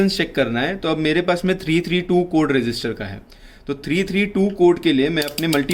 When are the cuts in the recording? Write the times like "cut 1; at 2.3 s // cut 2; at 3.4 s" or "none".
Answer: none